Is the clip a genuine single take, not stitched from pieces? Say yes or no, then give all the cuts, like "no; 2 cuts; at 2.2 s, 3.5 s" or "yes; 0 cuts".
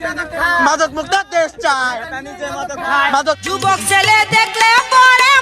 no; 1 cut; at 3.4 s